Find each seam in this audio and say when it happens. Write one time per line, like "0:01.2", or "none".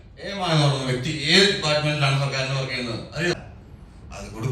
0:03.3